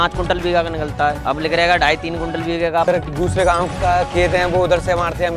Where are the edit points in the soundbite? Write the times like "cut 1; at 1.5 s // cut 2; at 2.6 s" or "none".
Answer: cut 1; at 1.2 s // cut 2; at 2.8 s